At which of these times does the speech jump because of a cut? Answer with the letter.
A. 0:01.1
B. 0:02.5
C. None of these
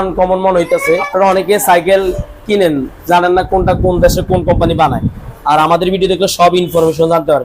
A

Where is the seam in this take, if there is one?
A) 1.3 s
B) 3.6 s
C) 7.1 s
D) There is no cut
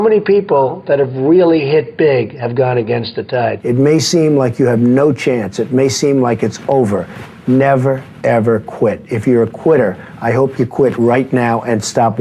B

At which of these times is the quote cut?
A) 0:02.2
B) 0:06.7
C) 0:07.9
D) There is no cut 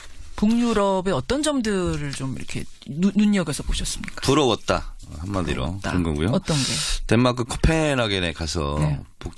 C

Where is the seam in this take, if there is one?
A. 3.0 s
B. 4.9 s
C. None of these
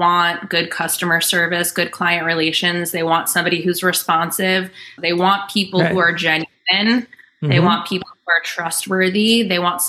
B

